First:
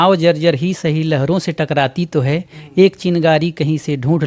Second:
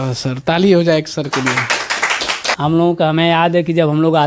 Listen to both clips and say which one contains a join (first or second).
second